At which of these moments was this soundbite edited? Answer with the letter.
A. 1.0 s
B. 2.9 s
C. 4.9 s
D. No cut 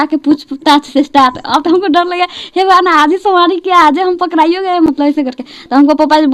D